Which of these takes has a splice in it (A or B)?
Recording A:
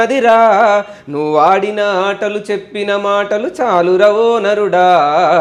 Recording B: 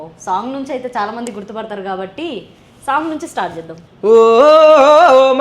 B